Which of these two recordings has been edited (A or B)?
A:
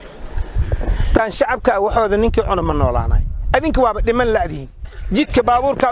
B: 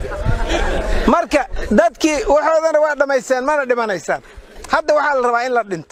A